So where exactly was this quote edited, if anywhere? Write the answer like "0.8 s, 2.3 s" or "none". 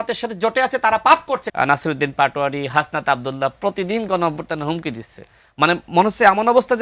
1.5 s